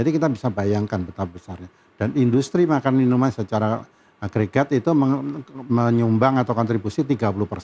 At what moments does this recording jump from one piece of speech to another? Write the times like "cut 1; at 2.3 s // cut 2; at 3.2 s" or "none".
none